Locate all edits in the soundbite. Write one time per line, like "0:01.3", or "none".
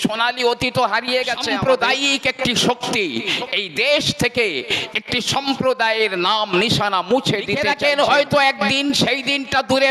0:01.5
0:07.7